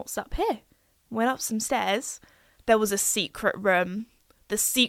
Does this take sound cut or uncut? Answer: uncut